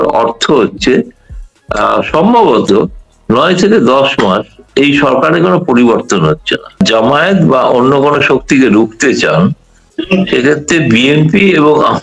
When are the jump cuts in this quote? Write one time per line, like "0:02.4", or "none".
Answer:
0:06.8